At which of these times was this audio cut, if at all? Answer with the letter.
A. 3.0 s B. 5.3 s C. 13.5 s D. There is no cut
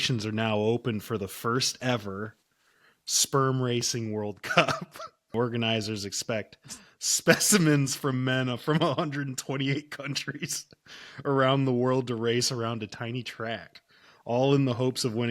B